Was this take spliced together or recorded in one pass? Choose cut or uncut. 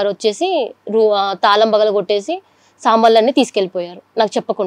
uncut